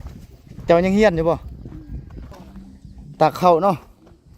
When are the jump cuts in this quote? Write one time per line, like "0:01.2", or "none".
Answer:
0:02.3